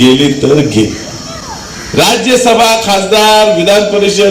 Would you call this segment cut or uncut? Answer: uncut